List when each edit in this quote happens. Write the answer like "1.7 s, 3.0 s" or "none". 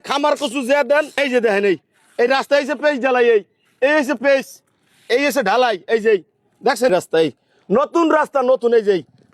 1.1 s, 6.9 s